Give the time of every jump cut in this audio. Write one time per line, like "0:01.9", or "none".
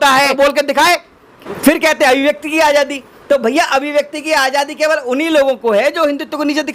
0:01.4